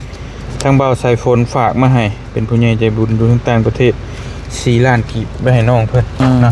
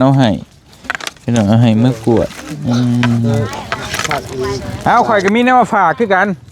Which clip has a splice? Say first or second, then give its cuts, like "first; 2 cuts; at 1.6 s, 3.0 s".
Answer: second; 1 cut; at 4.7 s